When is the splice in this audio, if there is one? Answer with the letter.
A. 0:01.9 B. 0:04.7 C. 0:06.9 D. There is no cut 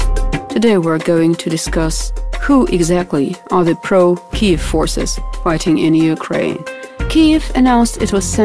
B